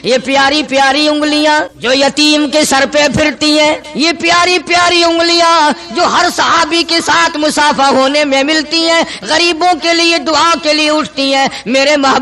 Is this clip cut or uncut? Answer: cut